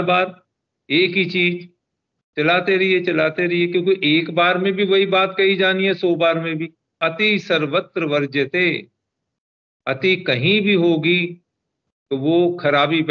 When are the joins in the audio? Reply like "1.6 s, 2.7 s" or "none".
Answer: 7.0 s